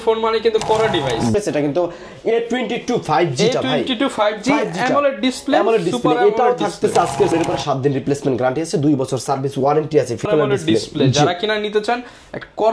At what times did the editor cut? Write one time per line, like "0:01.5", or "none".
0:01.3
0:07.3
0:10.3

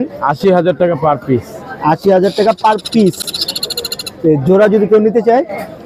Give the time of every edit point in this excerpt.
none

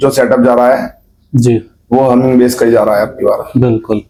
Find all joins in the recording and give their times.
none

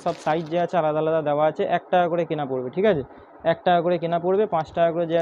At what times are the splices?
none

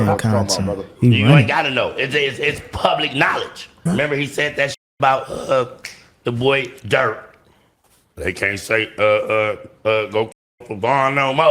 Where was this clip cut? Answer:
0:03.8

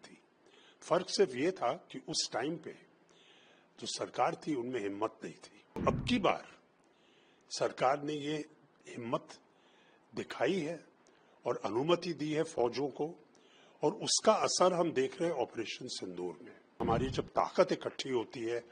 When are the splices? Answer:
0:05.8
0:16.8

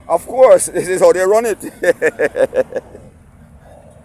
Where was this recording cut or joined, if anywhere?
none

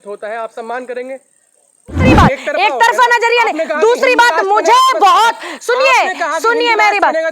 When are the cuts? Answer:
0:02.1

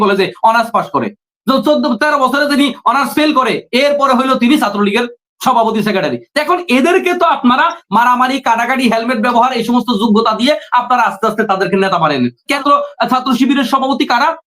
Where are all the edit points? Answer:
0:12.6

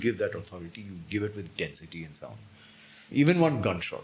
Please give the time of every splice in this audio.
0:03.0

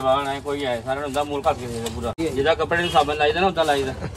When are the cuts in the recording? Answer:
0:02.2

